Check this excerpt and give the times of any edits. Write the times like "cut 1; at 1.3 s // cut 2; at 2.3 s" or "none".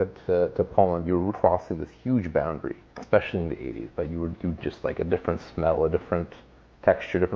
cut 1; at 1.3 s // cut 2; at 2.9 s